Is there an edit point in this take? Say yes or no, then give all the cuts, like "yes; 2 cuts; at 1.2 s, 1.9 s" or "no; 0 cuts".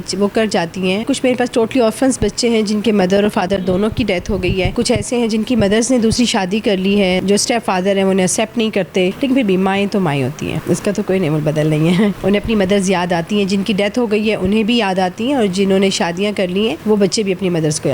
yes; 7 cuts; at 1.0 s, 4.7 s, 7.2 s, 9.2 s, 10.6 s, 12.2 s, 16.8 s